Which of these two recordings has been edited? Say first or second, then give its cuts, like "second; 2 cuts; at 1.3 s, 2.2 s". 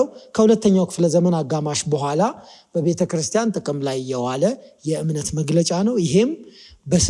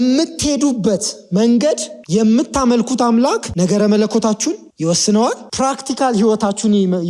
second; 4 cuts; at 1.9 s, 3.5 s, 4.7 s, 5.4 s